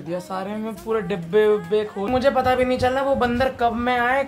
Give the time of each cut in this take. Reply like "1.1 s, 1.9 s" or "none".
2.3 s